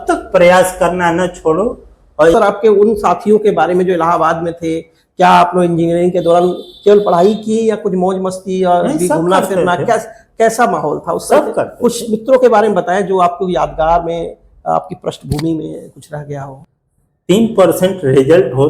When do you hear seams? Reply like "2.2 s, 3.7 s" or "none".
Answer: 2.3 s, 16.8 s